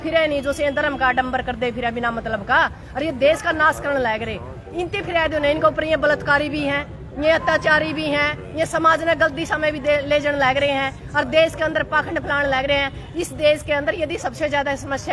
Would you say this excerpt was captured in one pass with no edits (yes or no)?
yes